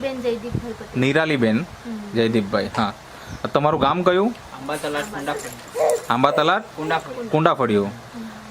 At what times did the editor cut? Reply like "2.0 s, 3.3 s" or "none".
none